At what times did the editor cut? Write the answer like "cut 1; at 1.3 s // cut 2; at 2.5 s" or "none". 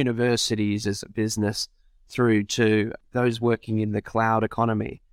cut 1; at 3.0 s

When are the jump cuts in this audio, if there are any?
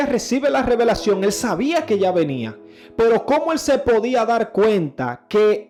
none

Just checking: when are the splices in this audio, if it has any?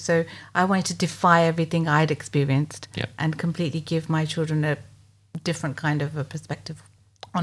none

